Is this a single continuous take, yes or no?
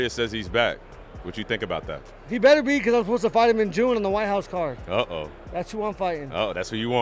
yes